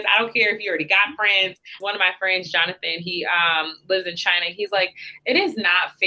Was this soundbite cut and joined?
yes; 1 cut; at 1.8 s

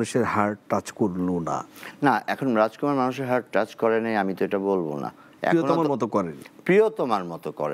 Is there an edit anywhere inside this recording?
no; 0 cuts

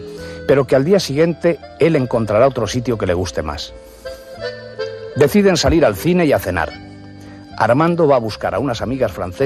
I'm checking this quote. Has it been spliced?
yes; 1 cut; at 2.1 s

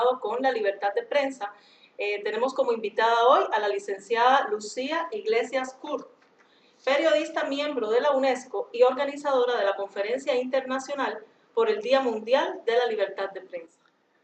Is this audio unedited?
yes; 0 cuts

